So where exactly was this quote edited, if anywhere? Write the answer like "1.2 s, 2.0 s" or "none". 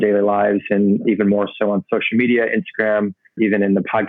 1.0 s, 3.3 s